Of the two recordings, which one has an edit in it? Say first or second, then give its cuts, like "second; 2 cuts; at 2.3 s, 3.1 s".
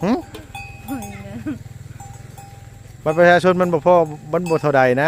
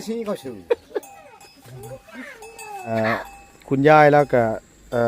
second; 1 cut; at 2.9 s